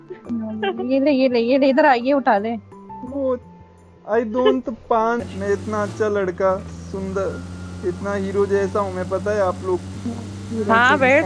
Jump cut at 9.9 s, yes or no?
yes